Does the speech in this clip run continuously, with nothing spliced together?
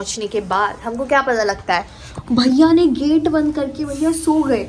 yes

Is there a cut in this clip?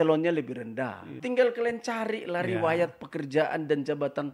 yes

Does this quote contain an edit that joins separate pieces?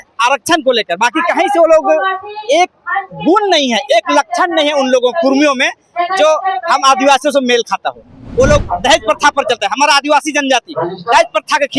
yes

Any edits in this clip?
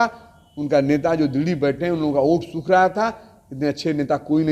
no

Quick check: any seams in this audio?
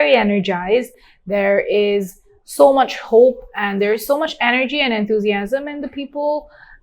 no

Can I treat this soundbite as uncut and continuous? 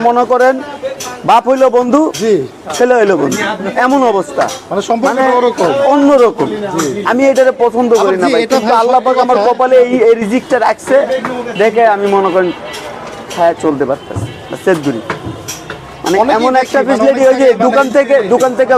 yes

